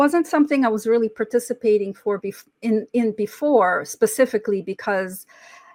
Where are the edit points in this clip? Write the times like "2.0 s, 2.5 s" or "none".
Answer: none